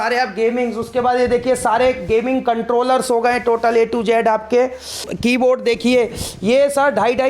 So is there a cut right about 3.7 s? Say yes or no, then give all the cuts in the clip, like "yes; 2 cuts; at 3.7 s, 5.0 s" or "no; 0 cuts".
no; 1 cut; at 5.1 s